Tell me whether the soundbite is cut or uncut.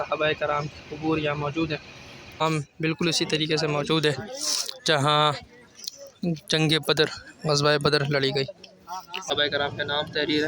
cut